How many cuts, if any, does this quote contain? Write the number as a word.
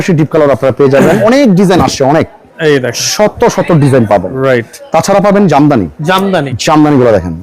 three